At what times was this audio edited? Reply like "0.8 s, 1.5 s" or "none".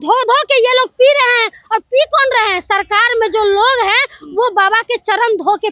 none